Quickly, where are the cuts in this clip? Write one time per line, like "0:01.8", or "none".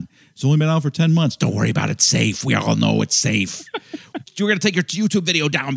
0:04.3